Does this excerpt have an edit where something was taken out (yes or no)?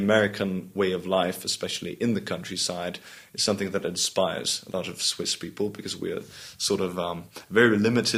no